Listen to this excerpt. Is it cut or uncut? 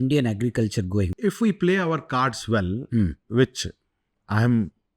cut